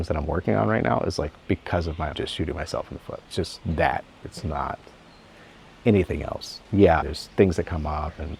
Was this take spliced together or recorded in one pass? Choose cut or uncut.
uncut